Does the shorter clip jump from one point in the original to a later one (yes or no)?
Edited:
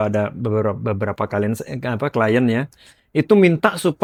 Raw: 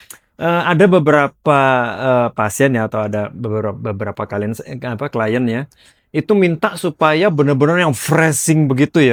no